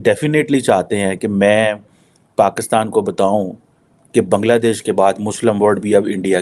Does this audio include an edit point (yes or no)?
no